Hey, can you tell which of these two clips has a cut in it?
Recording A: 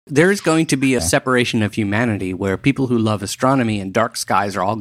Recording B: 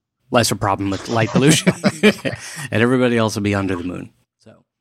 A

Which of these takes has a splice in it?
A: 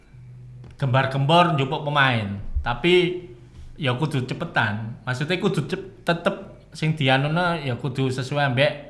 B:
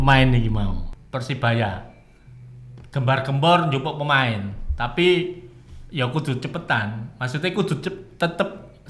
B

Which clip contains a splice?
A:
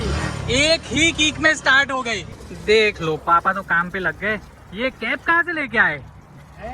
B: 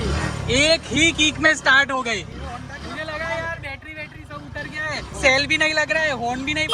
A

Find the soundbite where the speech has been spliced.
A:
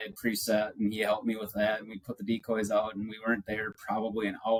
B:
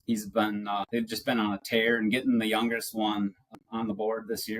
B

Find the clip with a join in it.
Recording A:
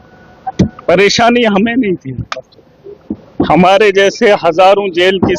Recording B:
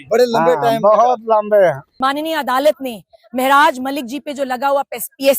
B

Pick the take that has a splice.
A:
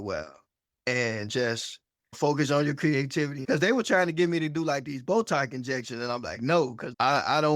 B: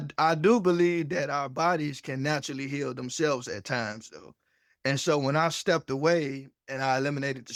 A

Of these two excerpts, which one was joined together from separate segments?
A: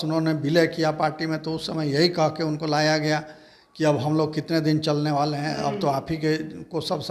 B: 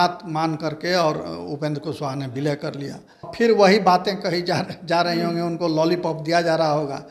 B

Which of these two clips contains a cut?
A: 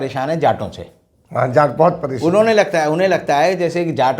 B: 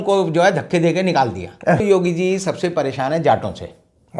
B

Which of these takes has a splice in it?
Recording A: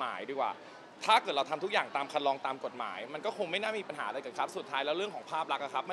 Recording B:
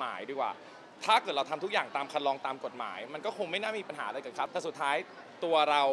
B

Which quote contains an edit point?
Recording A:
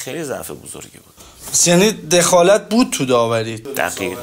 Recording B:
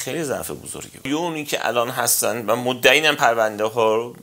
B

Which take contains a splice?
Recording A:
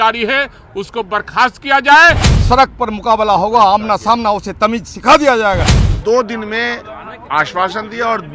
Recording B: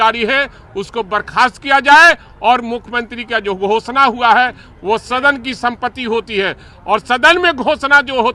A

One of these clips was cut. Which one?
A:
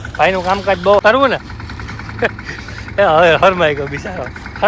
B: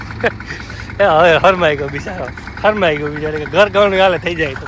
A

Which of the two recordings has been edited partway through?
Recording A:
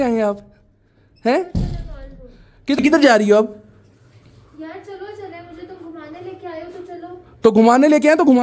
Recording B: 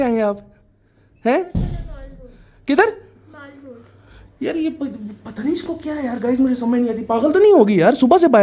A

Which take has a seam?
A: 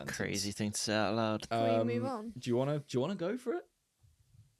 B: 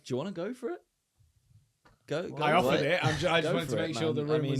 A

